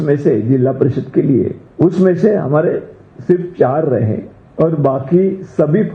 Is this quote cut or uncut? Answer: cut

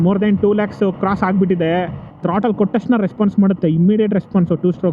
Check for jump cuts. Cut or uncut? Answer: cut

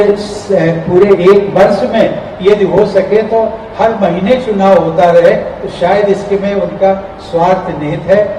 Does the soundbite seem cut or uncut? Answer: uncut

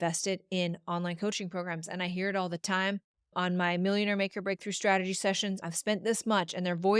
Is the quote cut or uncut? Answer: cut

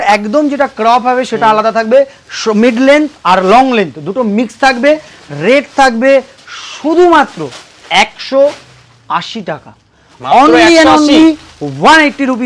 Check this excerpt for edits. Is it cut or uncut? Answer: uncut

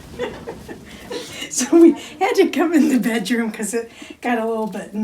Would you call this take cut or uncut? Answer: cut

